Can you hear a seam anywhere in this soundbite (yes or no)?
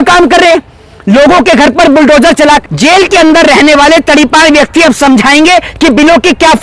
yes